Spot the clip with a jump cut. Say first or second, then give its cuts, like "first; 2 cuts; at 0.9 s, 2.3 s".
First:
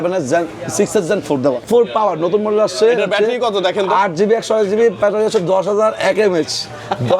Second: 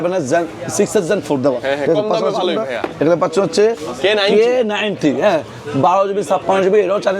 first; 1 cut; at 1.7 s